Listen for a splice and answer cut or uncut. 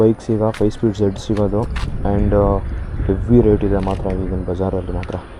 uncut